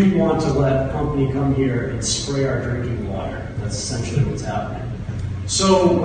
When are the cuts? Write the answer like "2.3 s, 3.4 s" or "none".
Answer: none